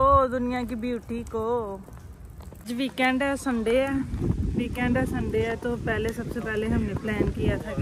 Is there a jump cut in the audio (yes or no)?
no